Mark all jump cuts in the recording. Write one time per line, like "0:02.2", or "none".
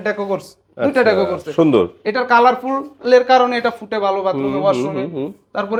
none